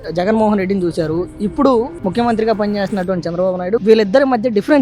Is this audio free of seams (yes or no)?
no